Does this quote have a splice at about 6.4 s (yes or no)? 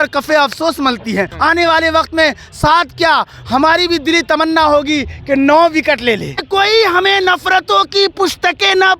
yes